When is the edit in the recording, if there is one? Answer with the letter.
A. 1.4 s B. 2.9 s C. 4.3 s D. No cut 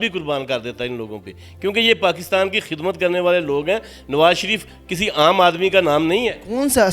D